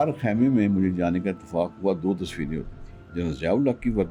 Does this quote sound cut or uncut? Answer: uncut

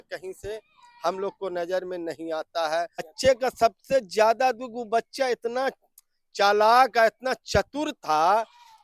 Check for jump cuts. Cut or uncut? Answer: cut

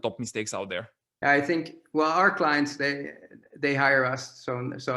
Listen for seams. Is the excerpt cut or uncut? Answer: cut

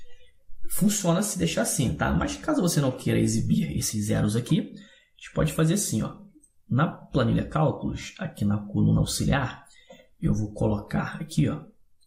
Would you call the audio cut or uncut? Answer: cut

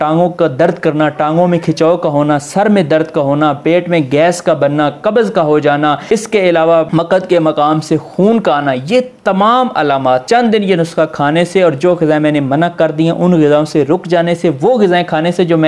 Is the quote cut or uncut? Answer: cut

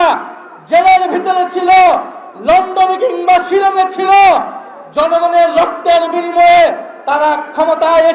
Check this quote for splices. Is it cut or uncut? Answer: uncut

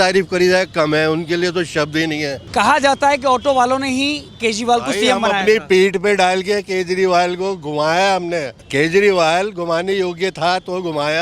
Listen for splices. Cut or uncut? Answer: cut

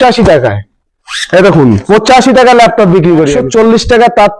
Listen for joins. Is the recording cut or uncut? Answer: cut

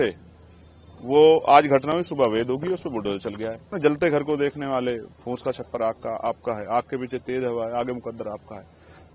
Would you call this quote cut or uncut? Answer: cut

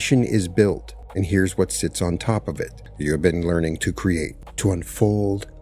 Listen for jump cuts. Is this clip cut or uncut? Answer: cut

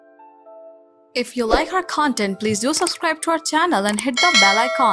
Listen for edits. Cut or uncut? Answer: cut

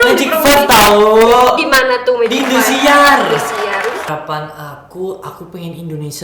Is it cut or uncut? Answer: cut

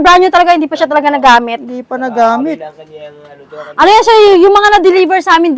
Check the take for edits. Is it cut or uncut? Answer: uncut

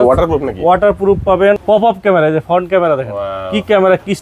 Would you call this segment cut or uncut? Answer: cut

